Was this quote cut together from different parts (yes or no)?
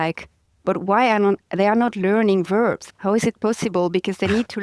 yes